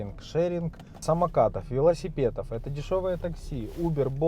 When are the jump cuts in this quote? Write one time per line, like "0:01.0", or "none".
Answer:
0:01.0